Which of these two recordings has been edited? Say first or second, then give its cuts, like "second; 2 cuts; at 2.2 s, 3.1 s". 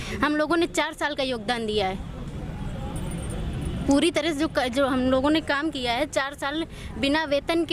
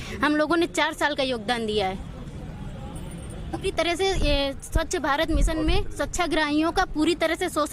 second; 1 cut; at 3.7 s